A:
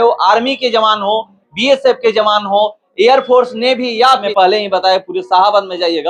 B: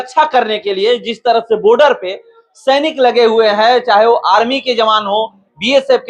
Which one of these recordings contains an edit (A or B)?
A